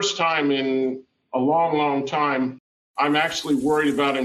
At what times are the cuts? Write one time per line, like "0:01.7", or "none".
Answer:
none